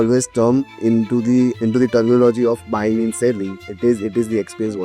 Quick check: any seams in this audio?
yes; 1 cut; at 1.6 s

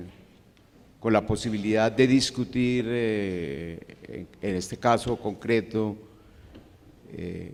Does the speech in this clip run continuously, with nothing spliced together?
yes; 0 cuts

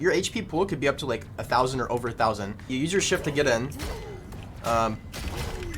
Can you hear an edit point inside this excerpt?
yes; 1 cut; at 2.7 s

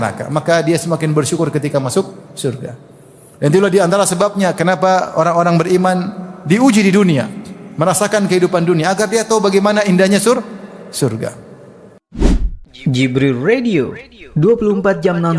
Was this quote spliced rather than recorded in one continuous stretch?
yes; 1 cut; at 12.0 s

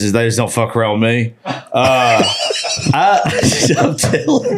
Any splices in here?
yes; 1 cut; at 2.8 s

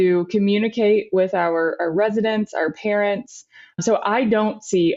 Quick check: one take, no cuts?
no; 1 cut; at 3.8 s

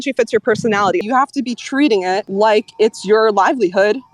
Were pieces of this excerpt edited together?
yes; 2 cuts; at 1.0 s, 2.3 s

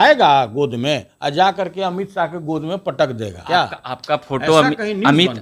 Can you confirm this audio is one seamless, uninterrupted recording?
no; 1 cut; at 3.3 s

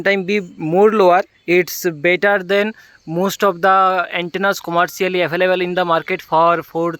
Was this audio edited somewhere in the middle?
yes; 1 cut; at 1.3 s

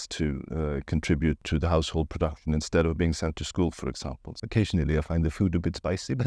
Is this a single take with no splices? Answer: no; 2 cuts; at 1.4 s, 4.3 s

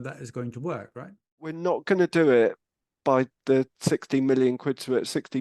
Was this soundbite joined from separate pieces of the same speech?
yes; 1 cut; at 1.6 s

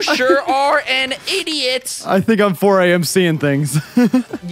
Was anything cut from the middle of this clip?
no; 0 cuts

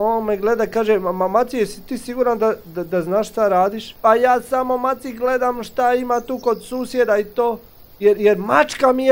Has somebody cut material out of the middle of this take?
no; 0 cuts

